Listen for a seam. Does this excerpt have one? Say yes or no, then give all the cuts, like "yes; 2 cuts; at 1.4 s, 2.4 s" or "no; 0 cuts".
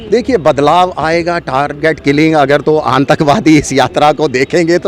no; 0 cuts